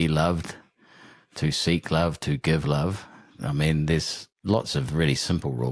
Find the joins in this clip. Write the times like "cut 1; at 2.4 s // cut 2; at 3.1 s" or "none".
none